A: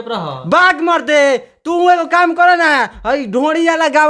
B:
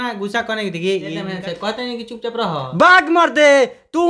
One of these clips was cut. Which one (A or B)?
B